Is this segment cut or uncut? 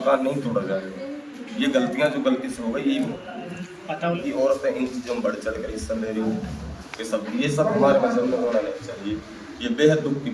cut